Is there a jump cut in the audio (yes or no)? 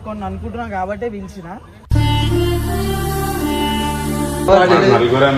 yes